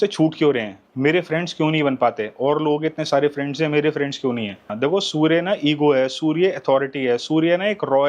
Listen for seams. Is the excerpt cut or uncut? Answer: cut